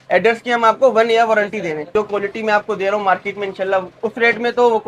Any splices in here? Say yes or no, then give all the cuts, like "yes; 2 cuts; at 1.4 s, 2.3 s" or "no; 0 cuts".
yes; 2 cuts; at 1.9 s, 3.9 s